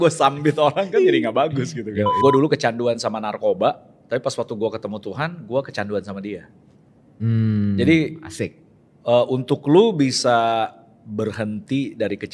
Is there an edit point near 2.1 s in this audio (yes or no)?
yes